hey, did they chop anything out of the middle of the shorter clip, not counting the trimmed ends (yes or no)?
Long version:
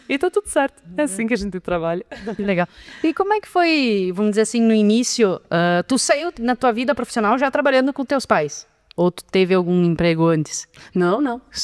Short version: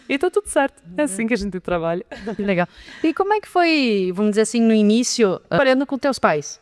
yes